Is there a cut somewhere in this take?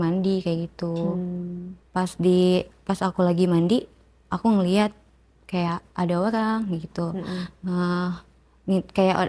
no; 0 cuts

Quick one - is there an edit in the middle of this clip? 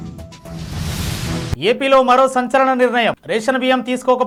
no; 0 cuts

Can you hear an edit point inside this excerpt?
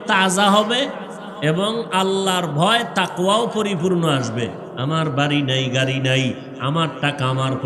yes; 1 cut; at 4.7 s

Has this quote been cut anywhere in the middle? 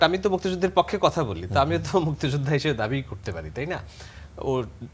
no; 0 cuts

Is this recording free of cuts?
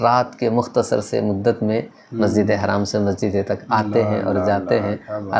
yes; 0 cuts

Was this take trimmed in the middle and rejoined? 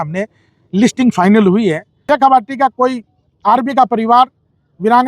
yes; 1 cut; at 1.9 s

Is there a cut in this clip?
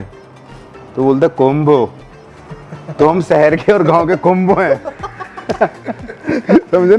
no; 0 cuts

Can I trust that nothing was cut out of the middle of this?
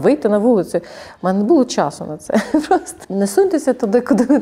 no; 1 cut; at 2.9 s

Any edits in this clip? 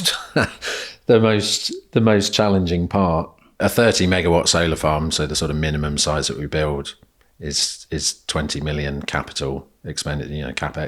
yes; 1 cut; at 3.6 s

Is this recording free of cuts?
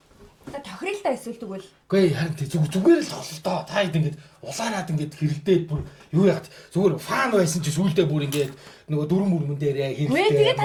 yes; 0 cuts

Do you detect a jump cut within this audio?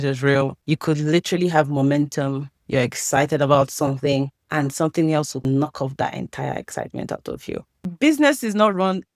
no; 0 cuts

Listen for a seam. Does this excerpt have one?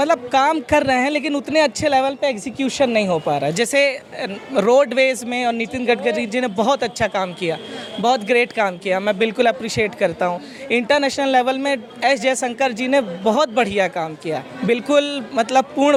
no; 0 cuts

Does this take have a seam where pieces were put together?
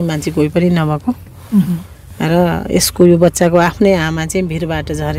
no; 0 cuts

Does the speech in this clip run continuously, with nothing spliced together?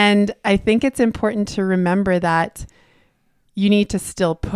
yes; 0 cuts

